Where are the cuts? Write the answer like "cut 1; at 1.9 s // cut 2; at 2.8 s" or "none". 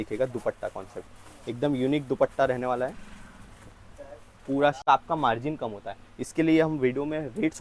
cut 1; at 4.8 s